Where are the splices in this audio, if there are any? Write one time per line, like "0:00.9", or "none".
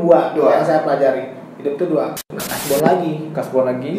0:02.2